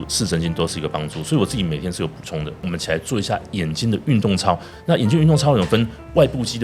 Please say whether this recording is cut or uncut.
cut